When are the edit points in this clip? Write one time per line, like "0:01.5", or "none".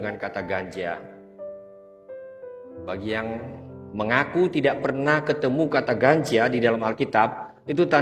none